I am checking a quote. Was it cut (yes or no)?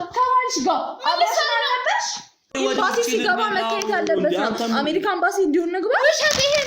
yes